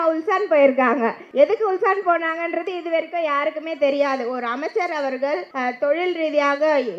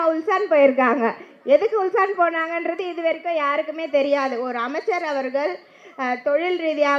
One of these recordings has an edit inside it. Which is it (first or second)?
first